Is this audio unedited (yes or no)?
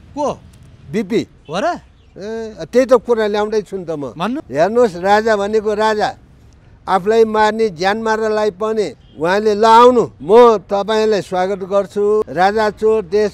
no